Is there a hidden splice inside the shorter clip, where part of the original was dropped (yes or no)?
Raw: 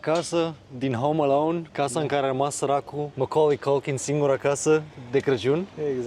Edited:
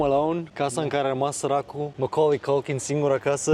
no